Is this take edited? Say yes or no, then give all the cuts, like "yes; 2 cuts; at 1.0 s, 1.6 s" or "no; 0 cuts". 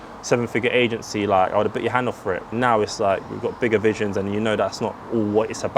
yes; 1 cut; at 2.5 s